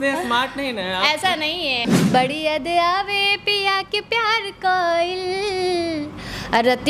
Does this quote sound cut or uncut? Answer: cut